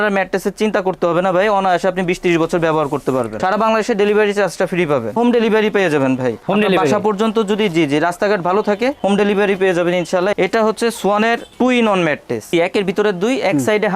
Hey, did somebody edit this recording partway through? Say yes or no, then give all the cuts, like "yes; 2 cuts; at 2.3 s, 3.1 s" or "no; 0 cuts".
yes; 4 cuts; at 3.3 s, 5.2 s, 10.3 s, 12.5 s